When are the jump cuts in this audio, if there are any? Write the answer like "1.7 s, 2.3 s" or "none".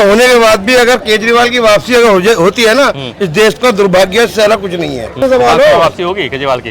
5.2 s